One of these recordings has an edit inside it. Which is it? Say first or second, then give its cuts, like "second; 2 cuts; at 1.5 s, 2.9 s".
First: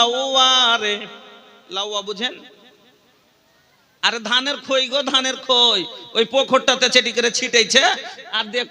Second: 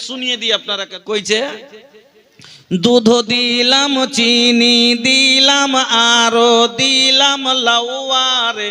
second; 1 cut; at 0.9 s